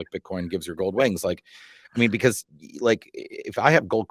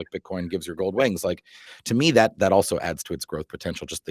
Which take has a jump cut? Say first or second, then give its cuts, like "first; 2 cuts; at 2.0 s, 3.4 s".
second; 1 cut; at 1.7 s